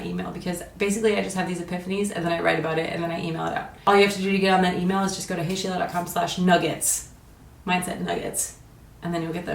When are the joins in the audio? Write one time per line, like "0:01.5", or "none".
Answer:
0:03.7

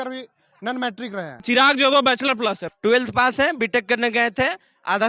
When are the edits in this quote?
0:01.4
0:02.6

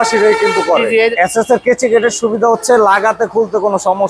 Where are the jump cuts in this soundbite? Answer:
0:01.1

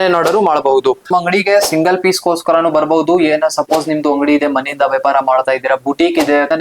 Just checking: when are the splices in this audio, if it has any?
0:01.0

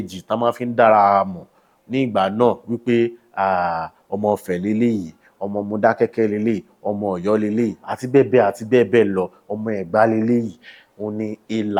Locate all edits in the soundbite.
none

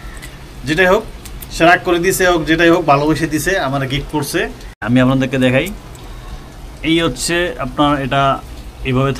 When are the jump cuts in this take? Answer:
0:04.8

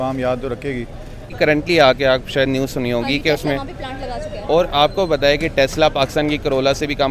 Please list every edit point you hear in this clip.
0:01.3

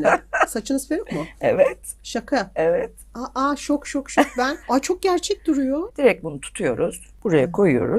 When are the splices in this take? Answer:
0:04.6
0:05.9
0:07.1

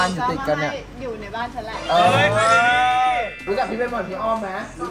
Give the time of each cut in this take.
0:03.4

